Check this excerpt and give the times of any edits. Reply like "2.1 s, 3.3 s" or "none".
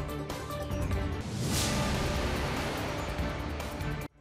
1.1 s

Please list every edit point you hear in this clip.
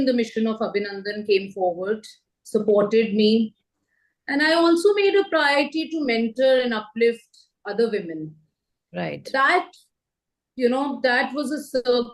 none

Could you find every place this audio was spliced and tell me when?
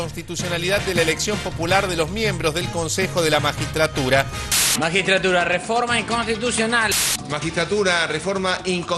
none

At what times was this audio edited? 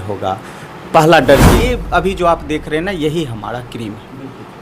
1.7 s

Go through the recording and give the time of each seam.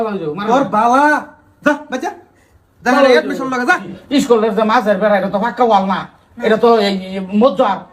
3.9 s

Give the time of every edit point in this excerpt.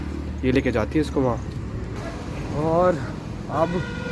1.9 s

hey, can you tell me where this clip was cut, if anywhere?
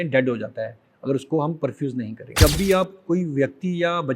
2.3 s

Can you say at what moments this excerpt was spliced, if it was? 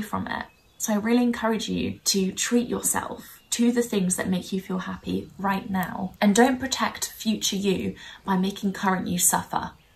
2.0 s, 6.1 s

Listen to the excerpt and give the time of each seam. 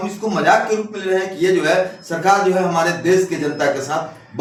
none

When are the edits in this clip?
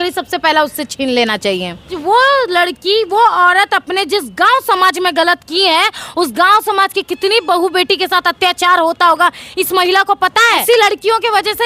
1.9 s, 10.6 s

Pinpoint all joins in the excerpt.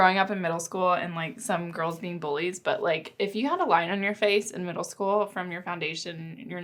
none

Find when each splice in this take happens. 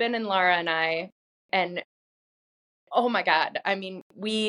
none

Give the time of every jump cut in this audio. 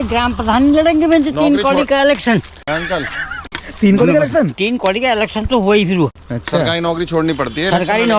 none

